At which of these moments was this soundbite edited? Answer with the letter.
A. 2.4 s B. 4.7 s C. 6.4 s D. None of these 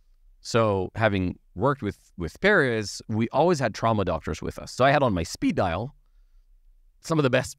B